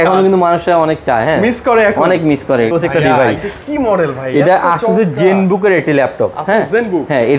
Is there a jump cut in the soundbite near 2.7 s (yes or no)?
yes